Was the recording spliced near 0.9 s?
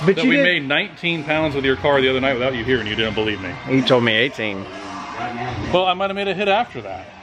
no; 0 cuts

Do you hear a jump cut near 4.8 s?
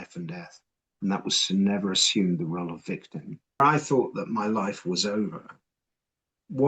no; 1 cut; at 3.6 s

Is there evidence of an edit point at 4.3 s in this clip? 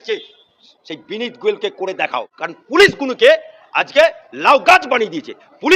no; 1 cut; at 2.4 s

